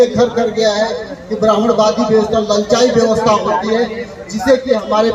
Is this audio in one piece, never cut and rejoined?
yes; 0 cuts

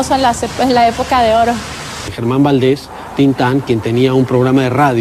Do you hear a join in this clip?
yes; 1 cut; at 1.9 s

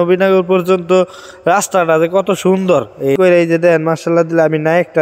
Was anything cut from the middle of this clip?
yes; 1 cut; at 3.2 s

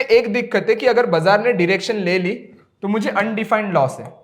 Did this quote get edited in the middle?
no; 0 cuts

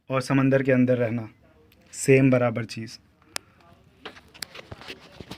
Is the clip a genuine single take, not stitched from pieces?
yes; 0 cuts

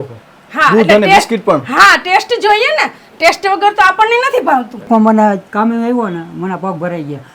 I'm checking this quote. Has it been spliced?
yes; 1 cut; at 4.9 s

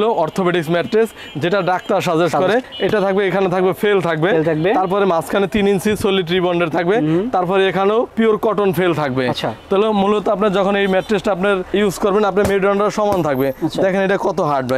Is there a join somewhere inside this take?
no; 0 cuts

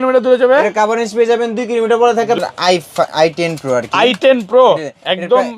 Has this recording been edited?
yes; 1 cut; at 2.4 s

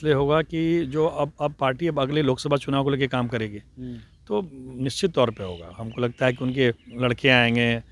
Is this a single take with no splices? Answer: yes; 0 cuts

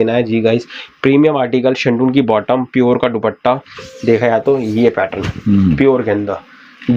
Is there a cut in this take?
no; 0 cuts

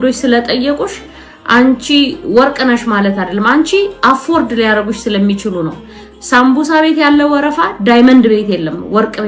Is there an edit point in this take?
no; 0 cuts

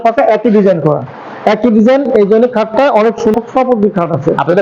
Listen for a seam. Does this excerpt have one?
yes; 1 cut; at 3.3 s

